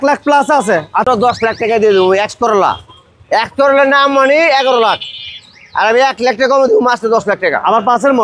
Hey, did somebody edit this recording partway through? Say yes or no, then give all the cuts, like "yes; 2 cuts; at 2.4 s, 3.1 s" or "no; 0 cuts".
yes; 1 cut; at 1.0 s